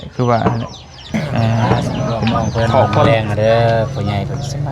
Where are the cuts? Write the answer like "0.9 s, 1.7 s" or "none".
3.1 s